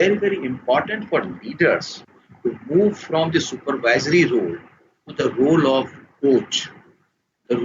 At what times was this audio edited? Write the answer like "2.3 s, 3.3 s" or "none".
none